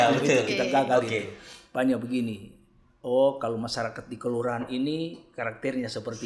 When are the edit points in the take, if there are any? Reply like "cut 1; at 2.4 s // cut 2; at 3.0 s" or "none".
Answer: none